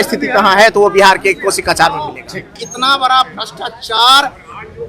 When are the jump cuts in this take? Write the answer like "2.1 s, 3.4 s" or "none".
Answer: 2.6 s